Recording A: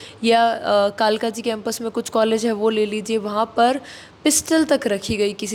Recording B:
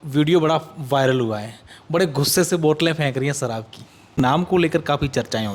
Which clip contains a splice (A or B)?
B